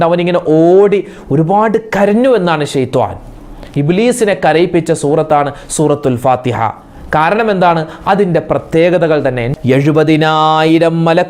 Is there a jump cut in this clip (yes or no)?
yes